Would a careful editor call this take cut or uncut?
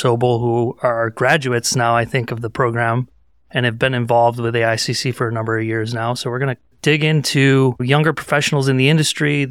uncut